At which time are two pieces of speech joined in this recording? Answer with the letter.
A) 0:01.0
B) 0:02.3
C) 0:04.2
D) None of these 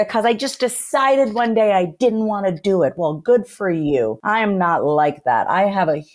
C